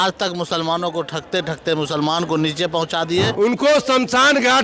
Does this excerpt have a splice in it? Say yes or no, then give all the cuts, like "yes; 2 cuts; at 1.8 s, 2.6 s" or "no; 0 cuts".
yes; 1 cut; at 3.3 s